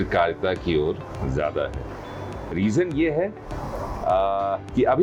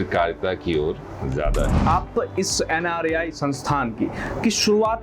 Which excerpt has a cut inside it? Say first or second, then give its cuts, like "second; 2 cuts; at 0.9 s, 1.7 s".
second; 1 cut; at 1.8 s